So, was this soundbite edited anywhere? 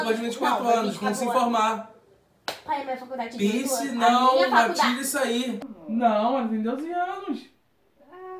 yes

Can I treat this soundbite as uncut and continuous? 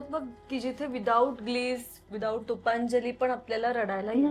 yes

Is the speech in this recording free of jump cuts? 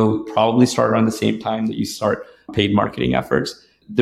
yes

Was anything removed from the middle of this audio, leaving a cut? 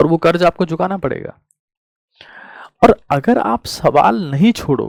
no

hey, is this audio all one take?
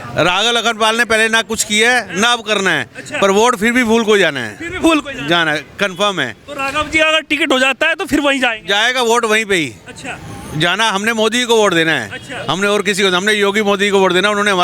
yes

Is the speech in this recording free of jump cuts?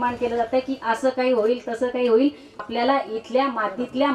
no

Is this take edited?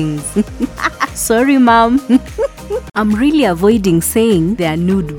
yes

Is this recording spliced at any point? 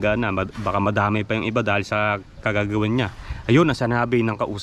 no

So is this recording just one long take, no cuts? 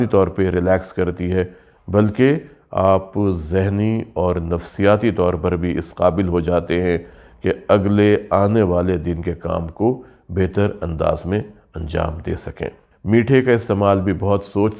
yes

